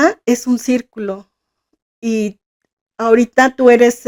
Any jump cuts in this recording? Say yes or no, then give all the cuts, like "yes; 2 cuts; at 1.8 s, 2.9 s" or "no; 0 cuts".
no; 0 cuts